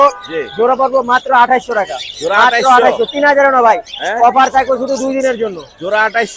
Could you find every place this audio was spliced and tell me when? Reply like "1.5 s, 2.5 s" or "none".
none